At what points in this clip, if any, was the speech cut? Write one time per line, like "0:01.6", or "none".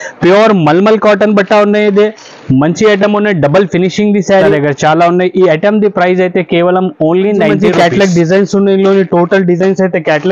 0:04.5
0:07.5